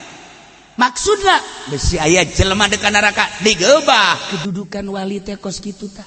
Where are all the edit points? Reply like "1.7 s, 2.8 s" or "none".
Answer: 4.3 s